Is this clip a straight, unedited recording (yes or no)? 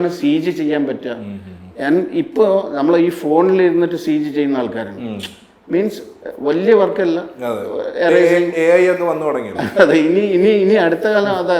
yes